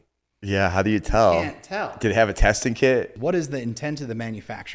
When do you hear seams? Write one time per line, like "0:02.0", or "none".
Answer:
0:03.1